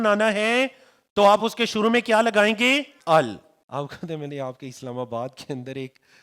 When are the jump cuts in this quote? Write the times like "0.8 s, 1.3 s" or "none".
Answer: 2.9 s, 3.5 s